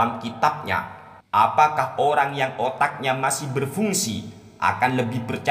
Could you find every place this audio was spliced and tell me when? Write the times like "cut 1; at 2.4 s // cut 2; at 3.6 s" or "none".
cut 1; at 1.0 s